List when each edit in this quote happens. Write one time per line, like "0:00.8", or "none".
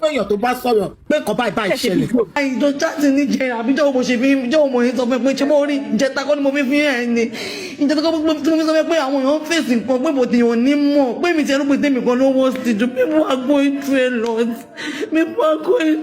0:01.0
0:02.3